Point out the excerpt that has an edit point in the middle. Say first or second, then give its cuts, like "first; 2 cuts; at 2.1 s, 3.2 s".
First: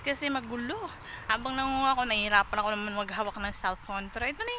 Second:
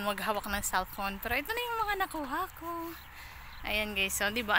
first; 1 cut; at 1.1 s